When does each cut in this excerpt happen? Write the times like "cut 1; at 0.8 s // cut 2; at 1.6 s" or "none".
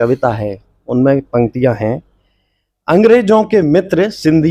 none

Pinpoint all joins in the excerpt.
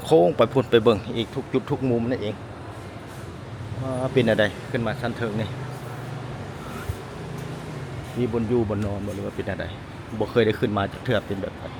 none

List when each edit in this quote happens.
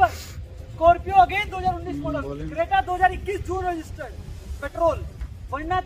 none

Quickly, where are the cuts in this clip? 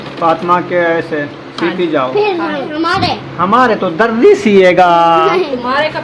cut 1; at 2.7 s

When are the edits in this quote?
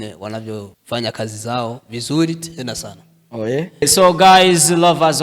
cut 1; at 3.8 s

